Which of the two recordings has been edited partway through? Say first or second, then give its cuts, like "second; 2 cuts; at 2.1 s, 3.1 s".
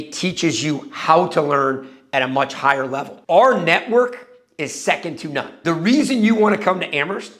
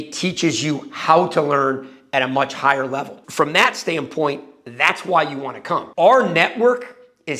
first; 1 cut; at 3.2 s